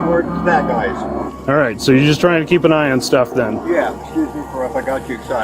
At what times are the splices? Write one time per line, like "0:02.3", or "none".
0:01.2
0:03.9

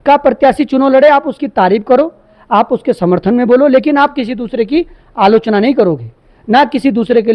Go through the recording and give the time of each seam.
none

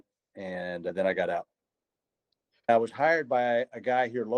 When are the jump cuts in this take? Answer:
0:00.9
0:02.7

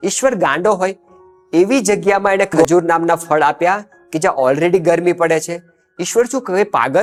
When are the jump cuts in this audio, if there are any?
none

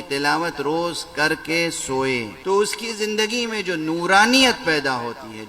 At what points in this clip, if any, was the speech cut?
0:02.3

